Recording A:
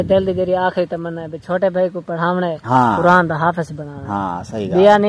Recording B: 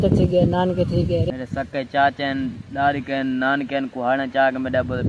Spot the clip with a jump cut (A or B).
B